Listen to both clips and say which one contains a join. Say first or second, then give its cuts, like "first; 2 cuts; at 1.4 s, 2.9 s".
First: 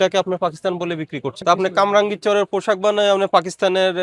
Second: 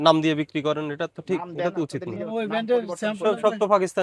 first; 1 cut; at 1.4 s